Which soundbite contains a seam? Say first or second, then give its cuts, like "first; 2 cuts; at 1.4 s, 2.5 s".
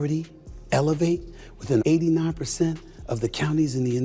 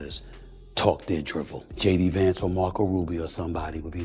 second; 1 cut; at 1.6 s